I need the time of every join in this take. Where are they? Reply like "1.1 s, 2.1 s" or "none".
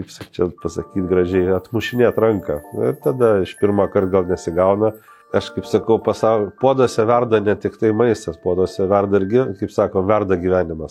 5.1 s